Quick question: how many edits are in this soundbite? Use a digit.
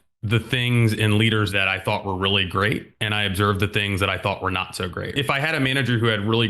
2